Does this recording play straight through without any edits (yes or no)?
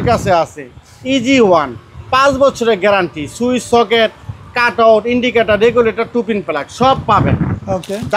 yes